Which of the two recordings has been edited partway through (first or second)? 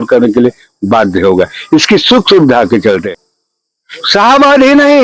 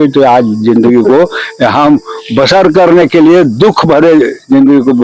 first